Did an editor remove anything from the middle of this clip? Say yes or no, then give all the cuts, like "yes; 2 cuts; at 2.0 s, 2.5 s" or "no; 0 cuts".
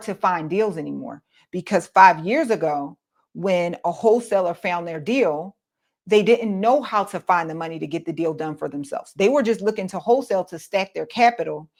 no; 0 cuts